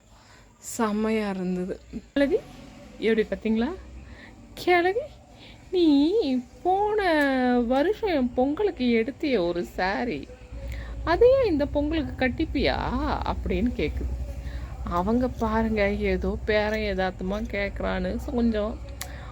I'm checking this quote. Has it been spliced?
yes; 1 cut; at 2.2 s

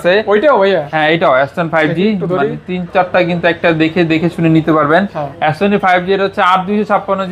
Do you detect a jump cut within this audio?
no; 0 cuts

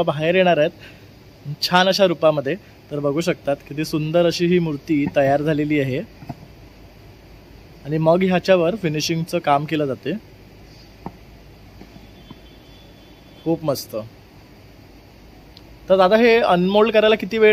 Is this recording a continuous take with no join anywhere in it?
yes; 0 cuts

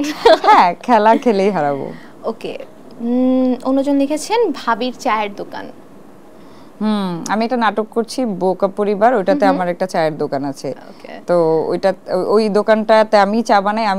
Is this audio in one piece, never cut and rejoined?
yes; 0 cuts

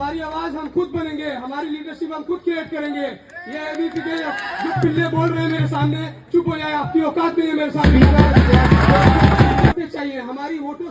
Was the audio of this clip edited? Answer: yes; 1 cut; at 9.7 s

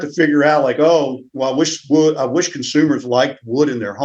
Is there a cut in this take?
no; 0 cuts

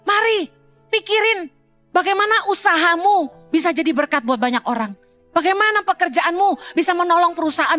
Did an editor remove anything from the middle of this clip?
no; 0 cuts

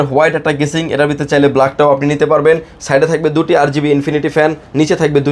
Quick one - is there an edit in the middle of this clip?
no; 0 cuts

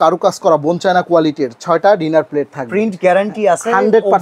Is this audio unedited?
yes; 0 cuts

